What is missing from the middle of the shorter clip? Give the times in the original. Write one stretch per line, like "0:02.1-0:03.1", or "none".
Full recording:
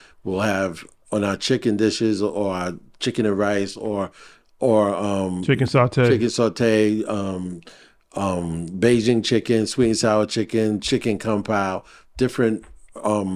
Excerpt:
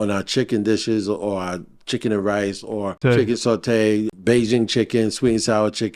0:04.1-0:05.9
0:07.1-0:08.7